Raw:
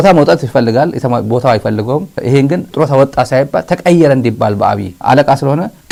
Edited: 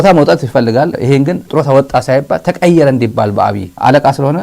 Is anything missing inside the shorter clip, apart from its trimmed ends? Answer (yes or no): yes